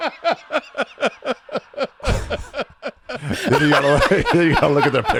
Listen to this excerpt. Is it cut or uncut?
uncut